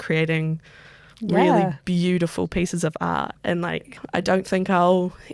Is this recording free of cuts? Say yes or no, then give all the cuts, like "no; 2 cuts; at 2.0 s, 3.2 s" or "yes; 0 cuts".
no; 1 cut; at 4.0 s